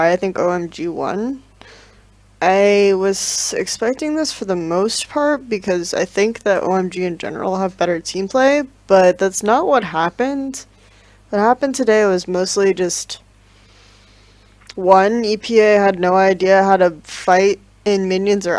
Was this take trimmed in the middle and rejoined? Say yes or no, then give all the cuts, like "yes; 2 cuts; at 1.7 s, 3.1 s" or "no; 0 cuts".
yes; 1 cut; at 9.0 s